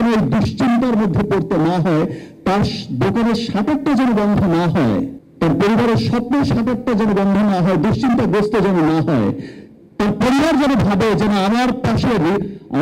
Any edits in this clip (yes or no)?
yes